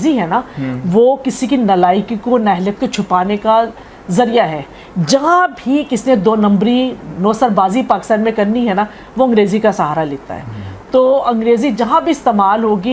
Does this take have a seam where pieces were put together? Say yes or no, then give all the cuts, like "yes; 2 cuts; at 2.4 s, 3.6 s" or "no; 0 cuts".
no; 0 cuts